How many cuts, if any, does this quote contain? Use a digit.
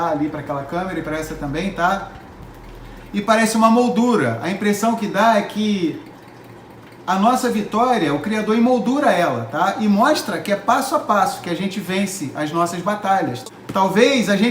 1